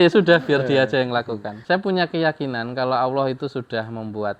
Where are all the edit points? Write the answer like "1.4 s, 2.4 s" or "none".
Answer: 1.5 s